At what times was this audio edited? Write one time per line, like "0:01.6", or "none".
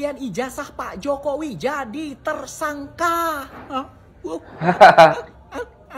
none